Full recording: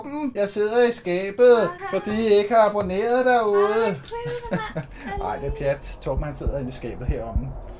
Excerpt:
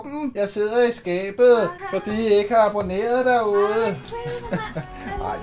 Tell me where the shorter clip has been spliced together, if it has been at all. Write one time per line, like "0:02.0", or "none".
none